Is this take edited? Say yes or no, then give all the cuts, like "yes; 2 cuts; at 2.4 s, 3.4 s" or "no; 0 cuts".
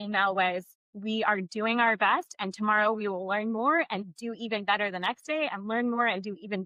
no; 0 cuts